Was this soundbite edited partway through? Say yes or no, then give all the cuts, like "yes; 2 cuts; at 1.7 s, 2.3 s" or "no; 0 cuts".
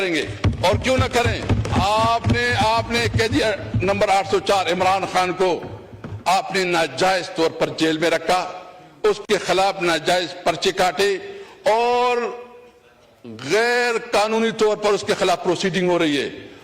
yes; 1 cut; at 1.7 s